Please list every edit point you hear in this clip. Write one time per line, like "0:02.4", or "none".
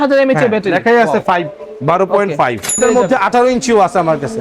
0:02.8